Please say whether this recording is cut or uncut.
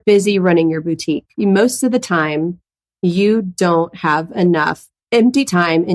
cut